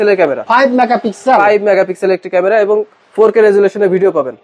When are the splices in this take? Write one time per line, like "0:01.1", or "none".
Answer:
none